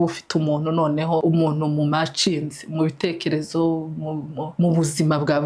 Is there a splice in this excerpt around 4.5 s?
yes; 2 cuts; at 1.2 s, 4.5 s

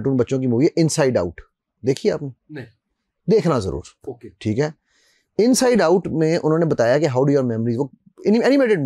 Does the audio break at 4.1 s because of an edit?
no; 0 cuts

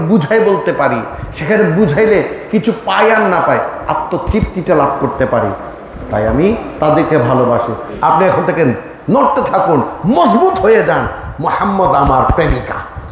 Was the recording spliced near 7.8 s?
yes; 1 cut; at 7.8 s

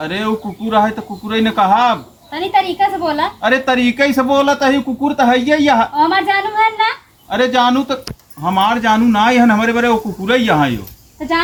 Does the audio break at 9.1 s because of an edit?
no; 0 cuts

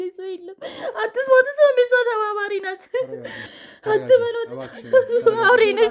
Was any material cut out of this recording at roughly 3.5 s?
yes; 1 cut; at 3.5 s

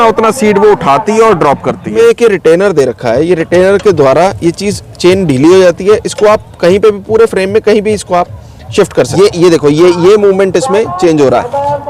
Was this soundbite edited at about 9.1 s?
yes; 2 cuts; at 1.9 s, 9.1 s

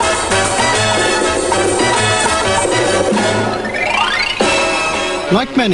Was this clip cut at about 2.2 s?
no; 0 cuts

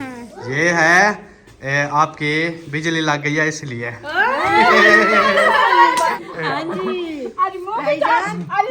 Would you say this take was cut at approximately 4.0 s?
no; 1 cut; at 6.1 s

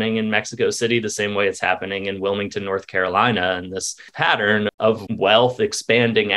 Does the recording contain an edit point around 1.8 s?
no; 2 cuts; at 4.1 s, 5.1 s

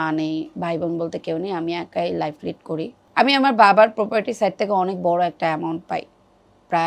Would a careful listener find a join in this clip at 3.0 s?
yes; 1 cut; at 3.0 s

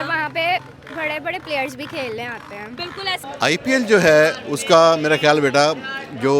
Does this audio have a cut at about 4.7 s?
no; 1 cut; at 3.2 s

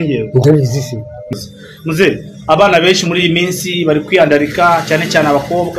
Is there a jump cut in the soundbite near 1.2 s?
yes; 1 cut; at 1.2 s

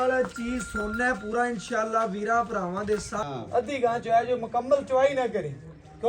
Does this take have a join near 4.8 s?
no; 1 cut; at 3.2 s

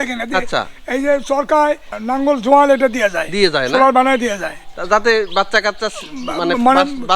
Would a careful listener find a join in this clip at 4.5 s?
no; 1 cut; at 1.9 s

